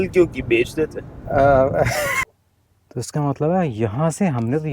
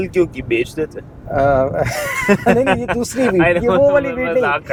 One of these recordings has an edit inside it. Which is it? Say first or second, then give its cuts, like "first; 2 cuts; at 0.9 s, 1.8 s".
first; 1 cut; at 2.1 s